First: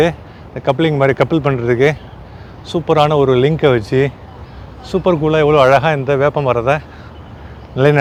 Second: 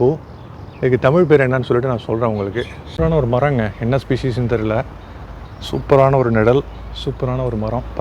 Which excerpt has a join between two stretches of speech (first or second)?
second